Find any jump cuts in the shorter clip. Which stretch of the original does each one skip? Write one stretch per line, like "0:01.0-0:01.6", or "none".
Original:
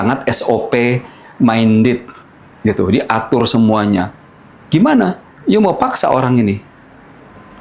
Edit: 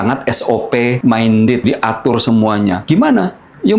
0:01.0-0:01.3
0:02.0-0:02.9
0:04.1-0:04.6